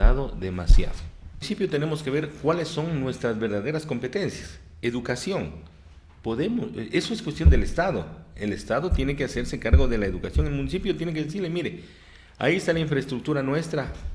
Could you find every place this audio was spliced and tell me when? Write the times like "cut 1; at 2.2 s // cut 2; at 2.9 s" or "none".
cut 1; at 1.4 s

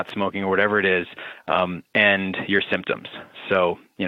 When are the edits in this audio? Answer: none

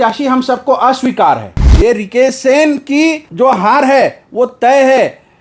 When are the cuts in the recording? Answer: cut 1; at 1.6 s // cut 2; at 3.2 s

